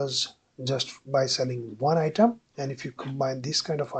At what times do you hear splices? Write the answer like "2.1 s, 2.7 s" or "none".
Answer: none